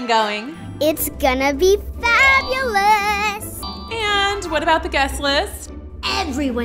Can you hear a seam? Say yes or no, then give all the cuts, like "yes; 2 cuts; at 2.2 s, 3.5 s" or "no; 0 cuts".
yes; 1 cut; at 3.6 s